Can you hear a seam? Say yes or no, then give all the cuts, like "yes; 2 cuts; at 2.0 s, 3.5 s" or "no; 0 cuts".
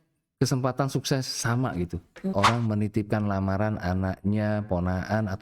yes; 1 cut; at 2.3 s